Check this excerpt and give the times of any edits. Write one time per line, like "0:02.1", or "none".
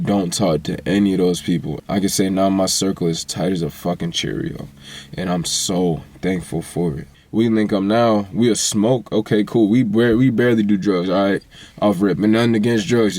0:01.7
0:07.1